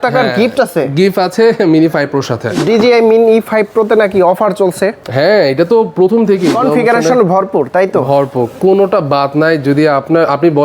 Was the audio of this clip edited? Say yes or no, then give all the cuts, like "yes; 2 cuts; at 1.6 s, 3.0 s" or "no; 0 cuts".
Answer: yes; 2 cuts; at 2.6 s, 6.5 s